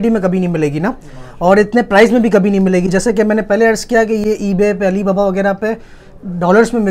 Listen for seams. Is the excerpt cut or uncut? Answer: uncut